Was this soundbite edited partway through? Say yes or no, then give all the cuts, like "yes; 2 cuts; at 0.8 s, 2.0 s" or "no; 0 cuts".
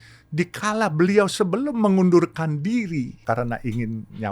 yes; 1 cut; at 3.2 s